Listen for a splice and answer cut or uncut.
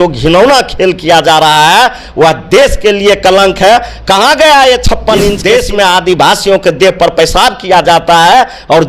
cut